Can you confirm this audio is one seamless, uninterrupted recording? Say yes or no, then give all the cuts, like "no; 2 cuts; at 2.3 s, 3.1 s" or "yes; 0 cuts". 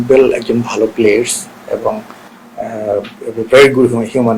yes; 0 cuts